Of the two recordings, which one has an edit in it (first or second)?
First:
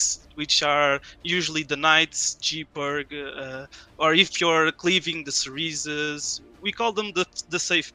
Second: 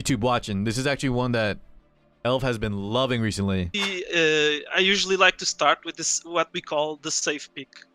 second